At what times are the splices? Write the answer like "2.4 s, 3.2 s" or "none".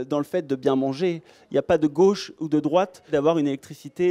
3.1 s